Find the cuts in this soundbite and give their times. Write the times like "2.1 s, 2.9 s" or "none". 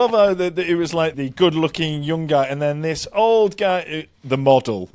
1.1 s